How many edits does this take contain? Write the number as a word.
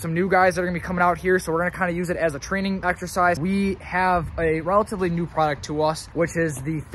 two